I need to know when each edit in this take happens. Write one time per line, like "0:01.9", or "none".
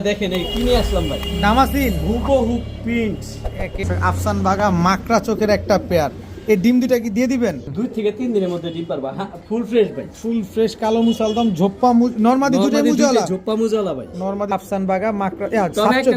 0:03.8
0:07.7
0:14.5